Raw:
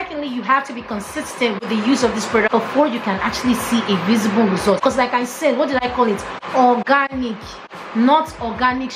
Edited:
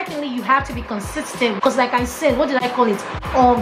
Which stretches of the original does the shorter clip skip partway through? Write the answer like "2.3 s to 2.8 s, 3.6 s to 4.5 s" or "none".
1.6 s to 4.8 s